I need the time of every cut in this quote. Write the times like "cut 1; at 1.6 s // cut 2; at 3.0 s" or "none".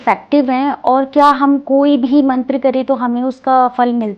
none